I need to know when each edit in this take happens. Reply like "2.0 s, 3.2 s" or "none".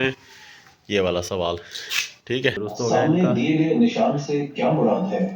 2.6 s